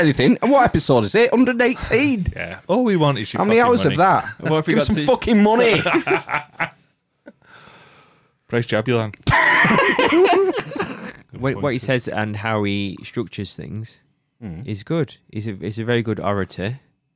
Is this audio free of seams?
no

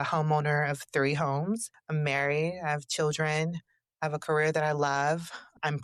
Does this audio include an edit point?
no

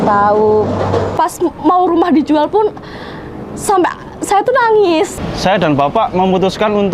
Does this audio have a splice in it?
yes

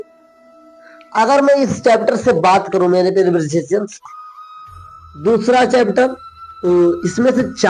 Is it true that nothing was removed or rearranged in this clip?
yes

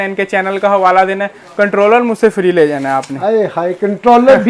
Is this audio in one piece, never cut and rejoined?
yes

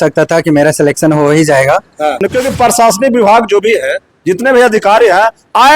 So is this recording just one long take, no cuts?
no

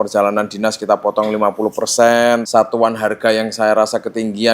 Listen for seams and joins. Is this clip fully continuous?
no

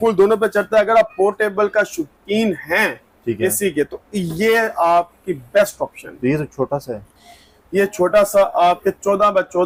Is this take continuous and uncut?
yes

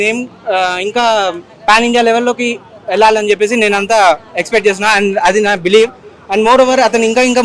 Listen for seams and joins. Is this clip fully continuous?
yes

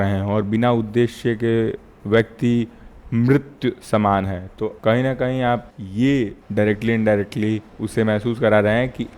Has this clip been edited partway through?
no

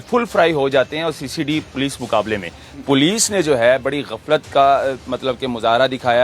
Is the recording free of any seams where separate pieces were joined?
no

